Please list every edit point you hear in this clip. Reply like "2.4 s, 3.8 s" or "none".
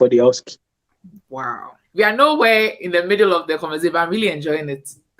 1.9 s